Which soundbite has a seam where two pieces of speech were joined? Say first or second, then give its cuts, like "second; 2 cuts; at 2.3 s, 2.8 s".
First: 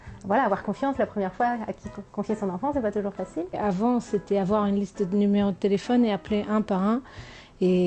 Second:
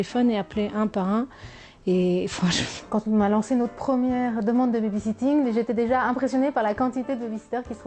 first; 1 cut; at 3.3 s